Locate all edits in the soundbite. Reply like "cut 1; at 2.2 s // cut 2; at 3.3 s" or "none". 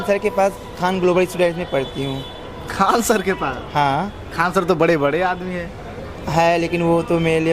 none